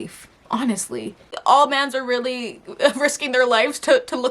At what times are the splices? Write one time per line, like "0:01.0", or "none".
0:01.3